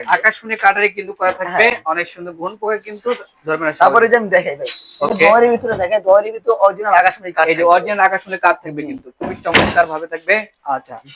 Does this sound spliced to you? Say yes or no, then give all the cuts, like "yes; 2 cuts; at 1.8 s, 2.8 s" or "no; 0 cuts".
no; 0 cuts